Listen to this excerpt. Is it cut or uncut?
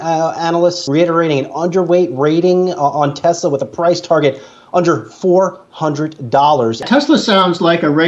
cut